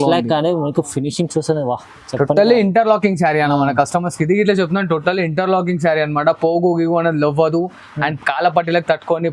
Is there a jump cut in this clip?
no; 0 cuts

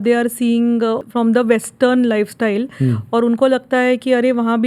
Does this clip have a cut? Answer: yes; 1 cut; at 1.0 s

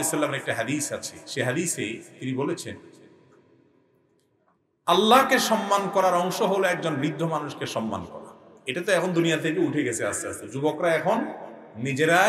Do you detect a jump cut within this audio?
no; 0 cuts

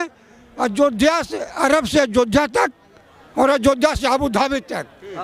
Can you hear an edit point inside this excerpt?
no; 0 cuts

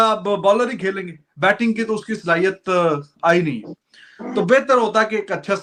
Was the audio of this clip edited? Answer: no; 0 cuts

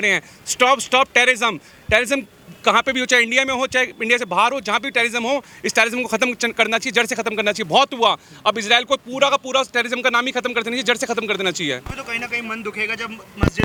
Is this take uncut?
yes; 0 cuts

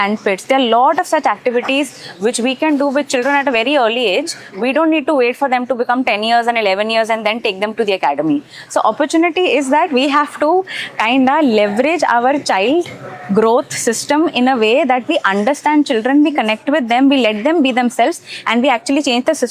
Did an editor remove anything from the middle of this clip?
no; 0 cuts

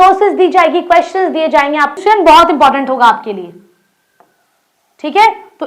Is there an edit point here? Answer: yes; 1 cut; at 2.0 s

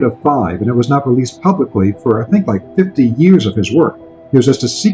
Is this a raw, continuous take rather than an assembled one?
yes; 0 cuts

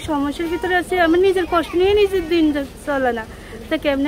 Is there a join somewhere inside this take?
no; 0 cuts

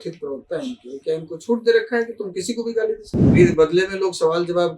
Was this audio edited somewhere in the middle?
yes; 1 cut; at 3.3 s

